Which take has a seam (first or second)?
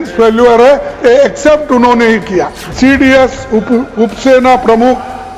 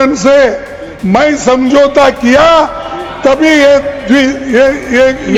first